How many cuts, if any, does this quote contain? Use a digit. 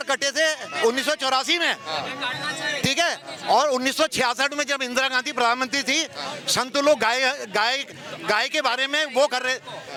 0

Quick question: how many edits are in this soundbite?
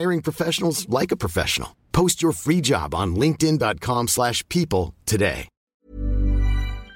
1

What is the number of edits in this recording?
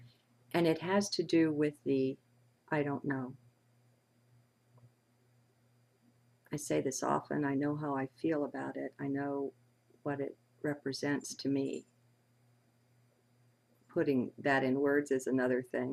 0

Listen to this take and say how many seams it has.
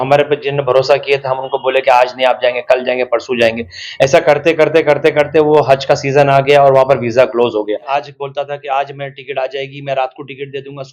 1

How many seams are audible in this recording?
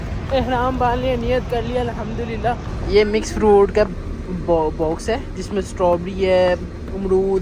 1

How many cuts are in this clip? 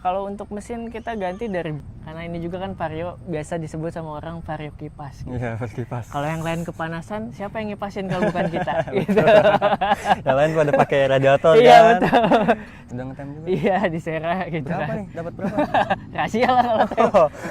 2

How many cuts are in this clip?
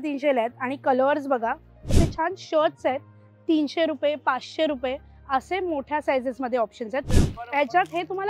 2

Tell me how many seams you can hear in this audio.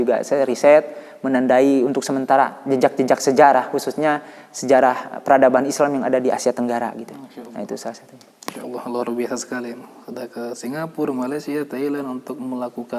0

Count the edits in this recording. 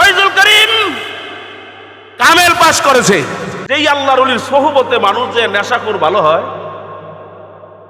1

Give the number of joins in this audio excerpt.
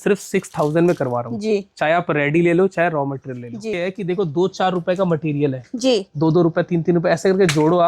1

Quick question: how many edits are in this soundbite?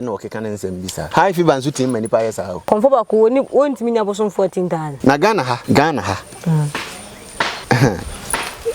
5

